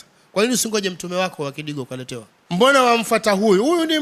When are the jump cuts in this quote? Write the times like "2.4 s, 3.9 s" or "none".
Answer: 2.3 s